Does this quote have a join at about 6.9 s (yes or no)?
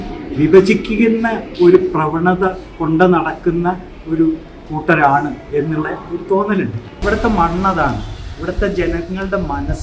yes